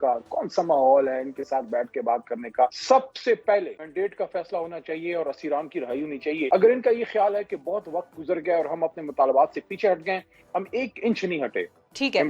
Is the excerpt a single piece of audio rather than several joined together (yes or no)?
no